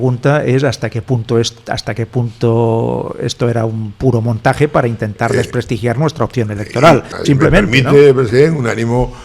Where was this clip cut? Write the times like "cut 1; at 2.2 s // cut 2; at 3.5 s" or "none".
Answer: cut 1; at 7.1 s